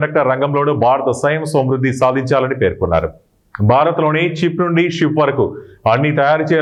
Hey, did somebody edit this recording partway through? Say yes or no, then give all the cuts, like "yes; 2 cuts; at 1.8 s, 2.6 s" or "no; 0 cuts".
no; 0 cuts